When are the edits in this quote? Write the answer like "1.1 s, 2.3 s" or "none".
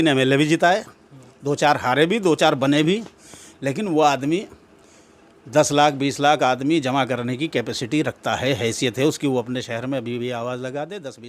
none

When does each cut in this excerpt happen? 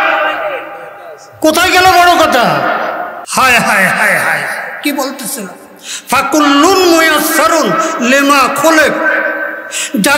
3.2 s

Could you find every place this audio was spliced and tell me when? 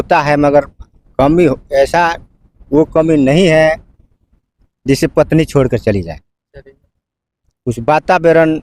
none

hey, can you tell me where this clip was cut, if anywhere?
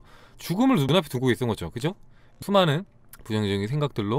2.4 s

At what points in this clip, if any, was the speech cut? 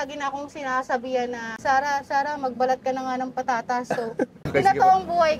1.5 s, 4.4 s

